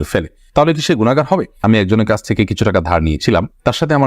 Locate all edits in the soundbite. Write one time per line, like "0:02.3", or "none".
0:01.6